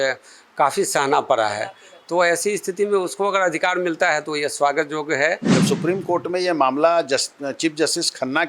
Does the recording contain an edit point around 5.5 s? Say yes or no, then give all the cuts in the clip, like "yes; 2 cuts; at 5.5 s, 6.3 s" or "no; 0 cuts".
yes; 1 cut; at 5.5 s